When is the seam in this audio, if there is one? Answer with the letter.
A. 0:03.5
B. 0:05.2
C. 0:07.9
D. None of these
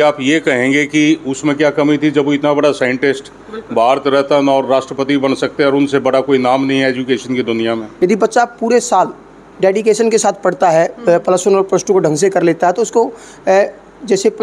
C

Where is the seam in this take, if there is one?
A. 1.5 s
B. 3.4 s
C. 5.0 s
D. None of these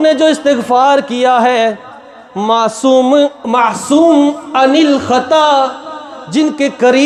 D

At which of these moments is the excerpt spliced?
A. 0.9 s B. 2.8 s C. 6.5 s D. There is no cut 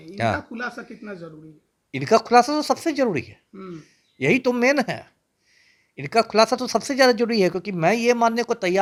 D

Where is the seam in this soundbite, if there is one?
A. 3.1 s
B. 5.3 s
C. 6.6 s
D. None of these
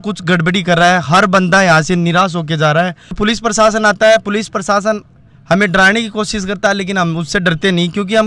A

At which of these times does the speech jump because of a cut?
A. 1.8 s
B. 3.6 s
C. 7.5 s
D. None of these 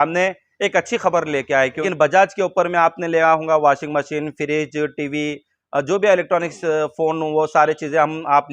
A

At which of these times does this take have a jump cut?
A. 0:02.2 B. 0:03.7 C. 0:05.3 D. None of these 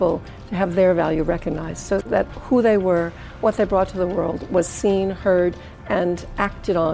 A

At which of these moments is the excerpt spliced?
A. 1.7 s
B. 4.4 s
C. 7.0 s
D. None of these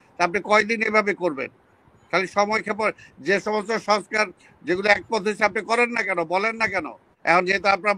C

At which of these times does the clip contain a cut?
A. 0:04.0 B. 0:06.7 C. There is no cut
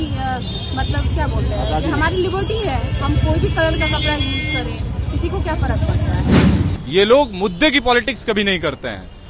B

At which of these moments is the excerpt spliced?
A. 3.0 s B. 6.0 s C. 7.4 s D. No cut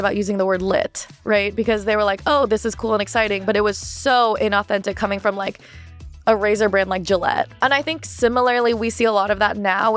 C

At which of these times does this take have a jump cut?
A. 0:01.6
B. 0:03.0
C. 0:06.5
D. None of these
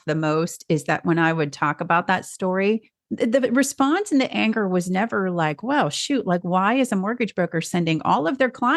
B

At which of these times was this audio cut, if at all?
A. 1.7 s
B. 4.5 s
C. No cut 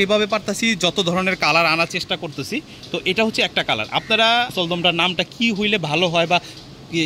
B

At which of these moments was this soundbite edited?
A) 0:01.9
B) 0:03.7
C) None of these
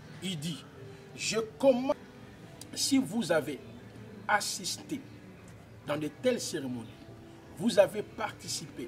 A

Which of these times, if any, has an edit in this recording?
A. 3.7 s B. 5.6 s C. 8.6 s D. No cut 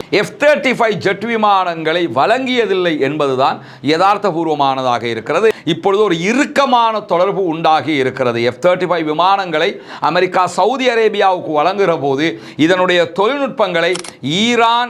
B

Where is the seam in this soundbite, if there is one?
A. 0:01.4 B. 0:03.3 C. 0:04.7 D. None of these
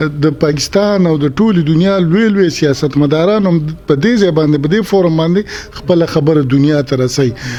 D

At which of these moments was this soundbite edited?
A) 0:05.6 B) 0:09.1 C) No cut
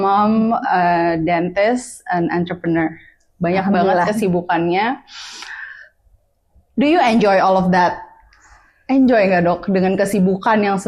C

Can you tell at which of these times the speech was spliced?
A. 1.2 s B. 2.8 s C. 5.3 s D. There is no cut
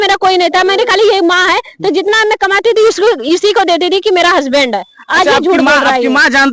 D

